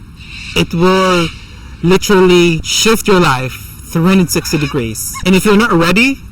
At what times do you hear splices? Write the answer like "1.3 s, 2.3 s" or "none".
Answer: 2.7 s, 5.0 s